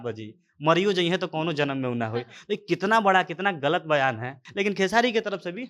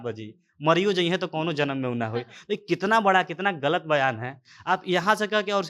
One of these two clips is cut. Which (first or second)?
first